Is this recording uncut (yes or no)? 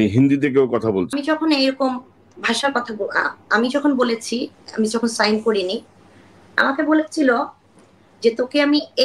no